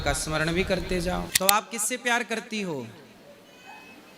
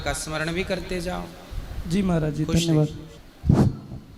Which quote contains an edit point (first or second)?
first